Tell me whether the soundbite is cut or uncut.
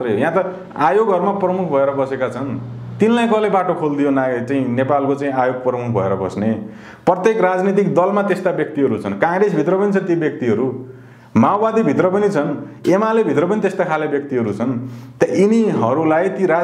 uncut